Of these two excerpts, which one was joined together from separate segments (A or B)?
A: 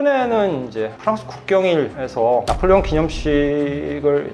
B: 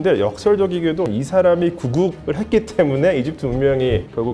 B